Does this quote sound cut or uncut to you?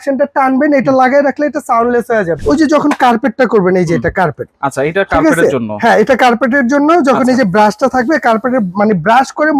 cut